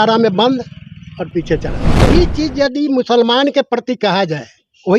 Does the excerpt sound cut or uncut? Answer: cut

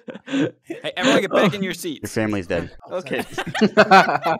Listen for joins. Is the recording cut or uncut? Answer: uncut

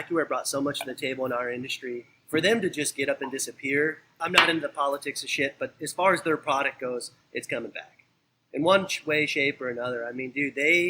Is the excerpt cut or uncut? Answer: cut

